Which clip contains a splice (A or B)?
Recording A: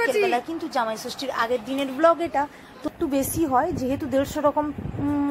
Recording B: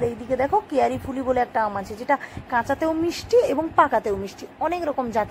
A